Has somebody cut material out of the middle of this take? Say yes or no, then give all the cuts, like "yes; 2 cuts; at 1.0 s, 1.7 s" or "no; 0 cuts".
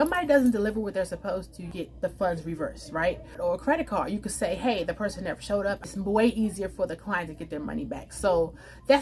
yes; 3 cuts; at 1.7 s, 3.3 s, 5.8 s